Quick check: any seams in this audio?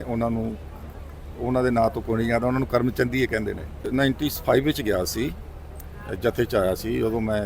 yes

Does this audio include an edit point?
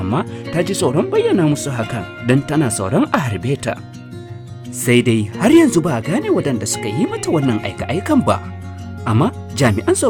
no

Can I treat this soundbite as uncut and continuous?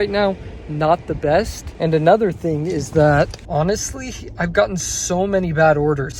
yes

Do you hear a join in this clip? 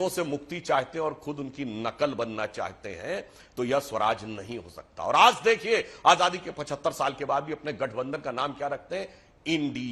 no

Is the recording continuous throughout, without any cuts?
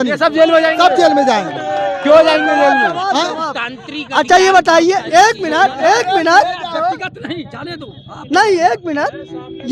yes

